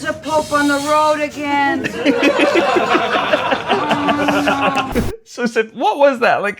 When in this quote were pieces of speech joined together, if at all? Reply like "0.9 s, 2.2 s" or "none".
4.9 s

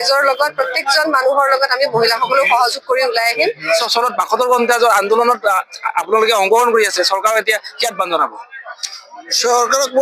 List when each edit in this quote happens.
none

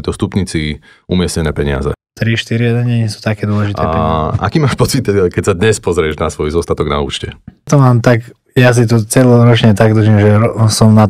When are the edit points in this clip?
2.1 s, 3.7 s, 7.7 s

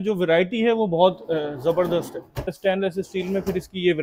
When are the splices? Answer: 2.5 s

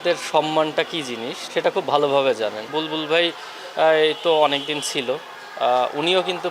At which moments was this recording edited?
1.3 s, 2.7 s

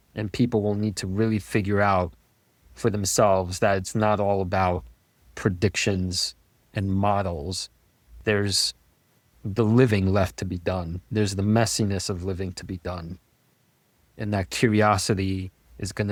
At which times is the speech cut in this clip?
none

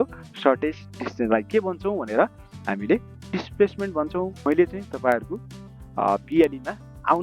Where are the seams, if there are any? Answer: 4.4 s

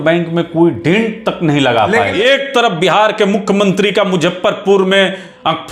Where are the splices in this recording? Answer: 2.1 s

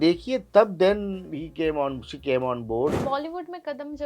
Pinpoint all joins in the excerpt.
3.0 s

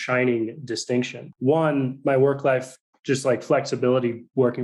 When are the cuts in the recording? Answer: 1.2 s

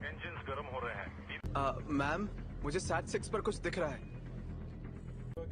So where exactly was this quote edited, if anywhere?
1.4 s

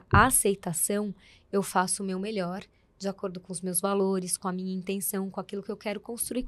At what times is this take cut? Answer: none

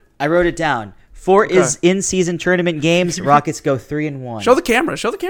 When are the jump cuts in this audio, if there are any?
none

